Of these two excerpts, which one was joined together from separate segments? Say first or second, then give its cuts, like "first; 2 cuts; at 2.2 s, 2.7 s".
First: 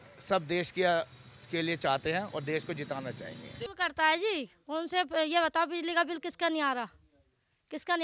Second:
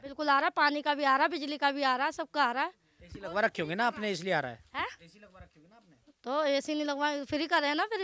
first; 1 cut; at 3.6 s